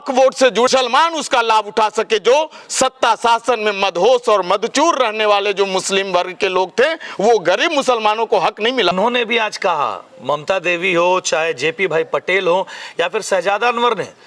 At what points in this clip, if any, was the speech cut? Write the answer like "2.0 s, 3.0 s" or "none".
0.7 s, 8.9 s